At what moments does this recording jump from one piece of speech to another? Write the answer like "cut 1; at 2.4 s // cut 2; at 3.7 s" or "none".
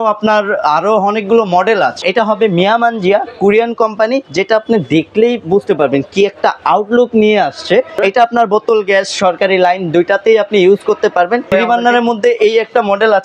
cut 1; at 2.0 s // cut 2; at 8.0 s // cut 3; at 11.5 s